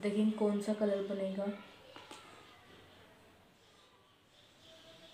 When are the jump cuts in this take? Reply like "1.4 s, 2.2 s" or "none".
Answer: 4.2 s